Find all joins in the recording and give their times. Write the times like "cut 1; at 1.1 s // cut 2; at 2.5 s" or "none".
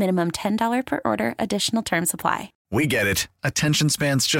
cut 1; at 2.5 s